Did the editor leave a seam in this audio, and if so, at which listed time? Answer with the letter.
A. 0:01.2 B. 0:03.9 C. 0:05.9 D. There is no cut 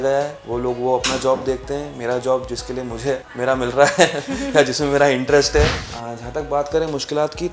C